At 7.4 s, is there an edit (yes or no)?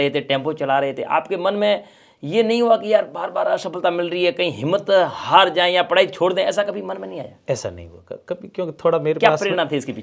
no